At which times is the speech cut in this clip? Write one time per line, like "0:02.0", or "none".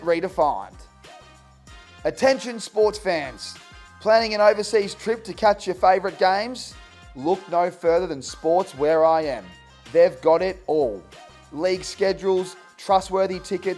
none